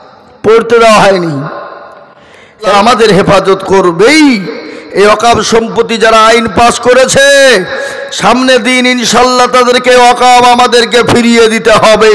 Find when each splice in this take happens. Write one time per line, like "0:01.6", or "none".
0:02.7